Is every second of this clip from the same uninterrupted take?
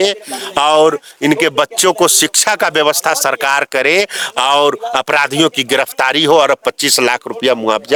yes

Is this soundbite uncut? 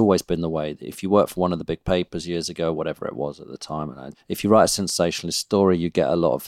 no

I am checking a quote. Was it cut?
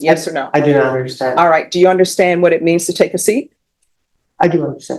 no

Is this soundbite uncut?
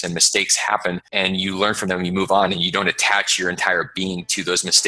no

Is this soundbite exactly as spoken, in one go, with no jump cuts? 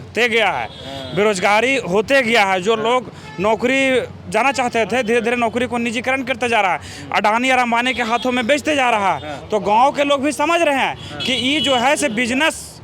yes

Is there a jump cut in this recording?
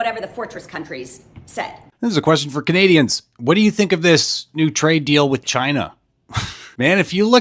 yes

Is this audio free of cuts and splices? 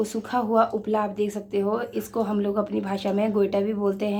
yes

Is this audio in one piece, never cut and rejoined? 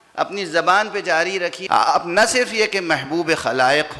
no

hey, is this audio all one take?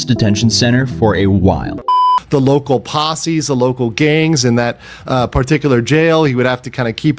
no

